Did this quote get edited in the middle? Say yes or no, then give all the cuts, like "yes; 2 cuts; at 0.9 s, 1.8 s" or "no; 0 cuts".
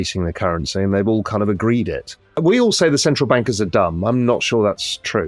yes; 1 cut; at 2.3 s